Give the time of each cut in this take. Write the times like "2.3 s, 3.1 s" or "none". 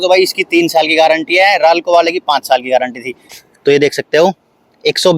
3.4 s